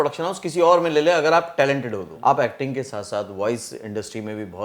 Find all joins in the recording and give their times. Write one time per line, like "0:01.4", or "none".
0:02.1